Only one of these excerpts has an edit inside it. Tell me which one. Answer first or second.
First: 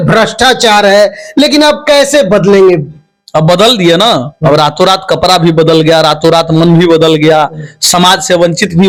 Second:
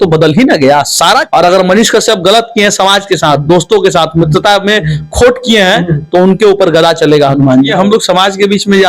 second